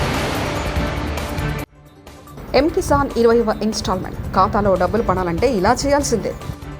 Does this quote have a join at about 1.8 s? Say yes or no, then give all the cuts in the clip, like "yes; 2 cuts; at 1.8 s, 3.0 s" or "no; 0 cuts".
yes; 1 cut; at 1.8 s